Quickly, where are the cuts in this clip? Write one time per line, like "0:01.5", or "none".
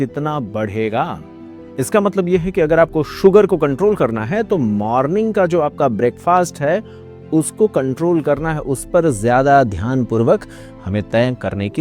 none